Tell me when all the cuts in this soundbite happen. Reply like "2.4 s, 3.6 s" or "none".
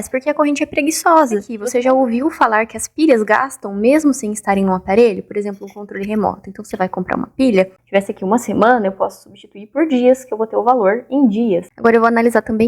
1.6 s, 7.8 s, 11.7 s